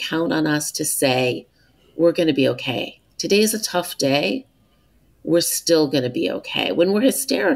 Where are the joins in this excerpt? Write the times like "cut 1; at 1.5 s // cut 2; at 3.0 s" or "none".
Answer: none